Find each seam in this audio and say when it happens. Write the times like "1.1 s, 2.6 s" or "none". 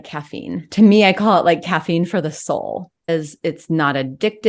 3.1 s

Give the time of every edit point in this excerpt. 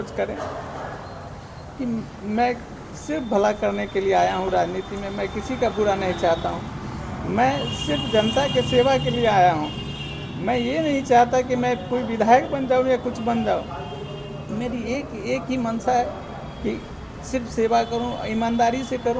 none

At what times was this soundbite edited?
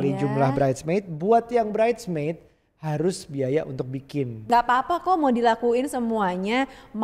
4.5 s

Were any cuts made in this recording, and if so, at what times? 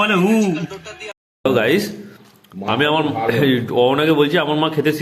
1.1 s

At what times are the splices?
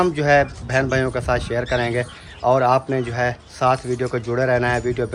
none

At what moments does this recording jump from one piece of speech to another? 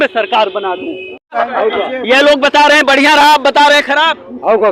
1.3 s

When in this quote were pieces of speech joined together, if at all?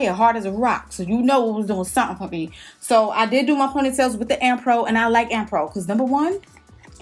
none

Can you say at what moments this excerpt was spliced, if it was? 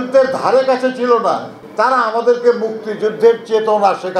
1.6 s

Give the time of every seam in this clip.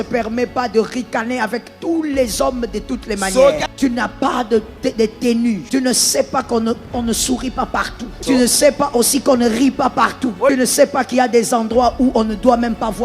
3.7 s, 5.6 s, 8.2 s, 10.5 s

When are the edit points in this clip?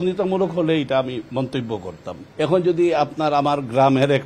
2.2 s

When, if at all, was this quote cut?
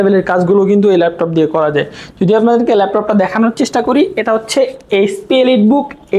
none

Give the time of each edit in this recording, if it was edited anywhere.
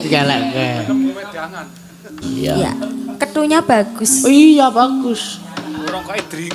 2.2 s

